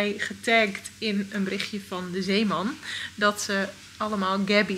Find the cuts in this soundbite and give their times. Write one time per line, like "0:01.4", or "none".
none